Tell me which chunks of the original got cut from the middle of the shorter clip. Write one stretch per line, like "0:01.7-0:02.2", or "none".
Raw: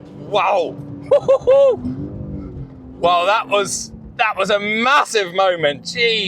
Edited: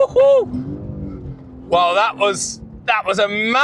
none